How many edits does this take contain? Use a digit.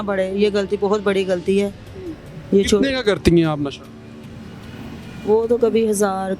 0